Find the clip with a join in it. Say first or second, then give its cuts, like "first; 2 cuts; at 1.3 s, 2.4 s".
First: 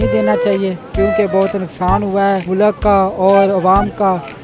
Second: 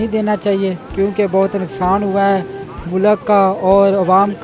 first; 1 cut; at 2.4 s